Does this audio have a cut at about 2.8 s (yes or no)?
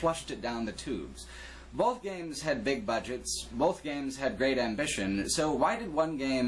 yes